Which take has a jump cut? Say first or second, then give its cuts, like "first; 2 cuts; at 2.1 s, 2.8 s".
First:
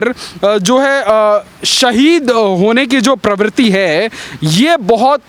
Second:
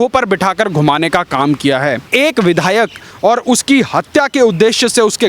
second; 1 cut; at 2.1 s